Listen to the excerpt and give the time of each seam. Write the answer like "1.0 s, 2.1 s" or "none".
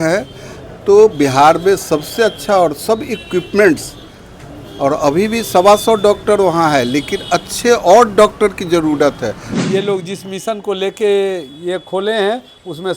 9.5 s